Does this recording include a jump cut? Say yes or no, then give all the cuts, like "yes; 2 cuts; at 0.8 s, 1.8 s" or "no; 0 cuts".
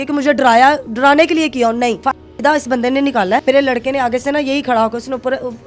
yes; 2 cuts; at 2.0 s, 3.4 s